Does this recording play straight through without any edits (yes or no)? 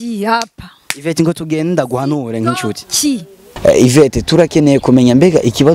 no